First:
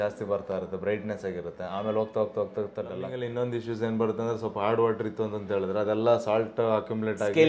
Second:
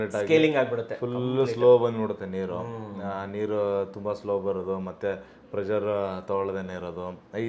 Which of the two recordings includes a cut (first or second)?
first